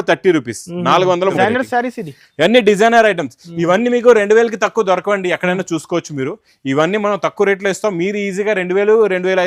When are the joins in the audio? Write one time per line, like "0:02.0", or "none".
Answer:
0:01.3